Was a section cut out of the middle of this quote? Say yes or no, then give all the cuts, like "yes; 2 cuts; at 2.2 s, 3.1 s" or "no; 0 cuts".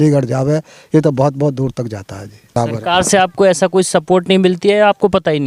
yes; 1 cut; at 2.5 s